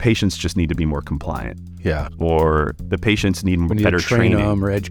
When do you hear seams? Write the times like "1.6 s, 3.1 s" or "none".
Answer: 2.8 s